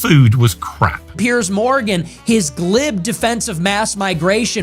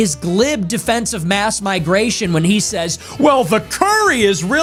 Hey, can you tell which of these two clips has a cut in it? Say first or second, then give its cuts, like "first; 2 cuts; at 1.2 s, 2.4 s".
first; 1 cut; at 1.0 s